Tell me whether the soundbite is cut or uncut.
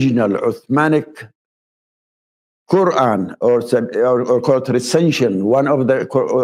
uncut